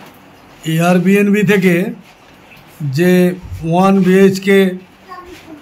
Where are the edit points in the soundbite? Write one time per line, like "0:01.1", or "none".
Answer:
none